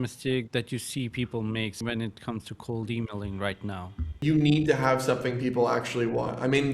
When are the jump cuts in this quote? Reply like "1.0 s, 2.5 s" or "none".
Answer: 1.8 s, 4.2 s